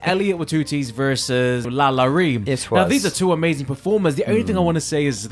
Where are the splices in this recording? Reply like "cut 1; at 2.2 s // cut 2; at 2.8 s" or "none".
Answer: cut 1; at 1.7 s